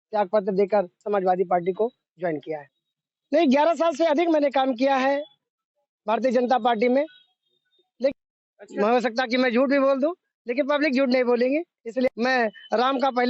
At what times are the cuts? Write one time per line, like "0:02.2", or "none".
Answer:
0:01.0
0:02.8
0:08.1
0:12.1